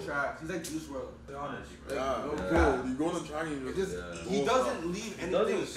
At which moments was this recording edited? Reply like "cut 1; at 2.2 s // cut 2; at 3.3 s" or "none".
cut 1; at 1.2 s